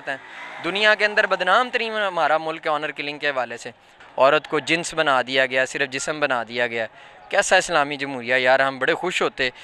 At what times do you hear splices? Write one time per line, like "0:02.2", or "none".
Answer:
0:03.9